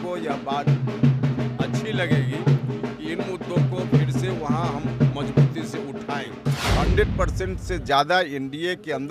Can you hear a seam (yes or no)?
yes